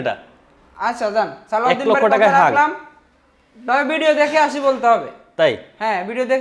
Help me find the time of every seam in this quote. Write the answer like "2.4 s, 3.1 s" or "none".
none